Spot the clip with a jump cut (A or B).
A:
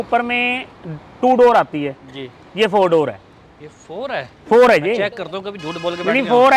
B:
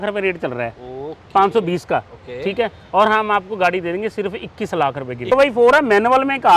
B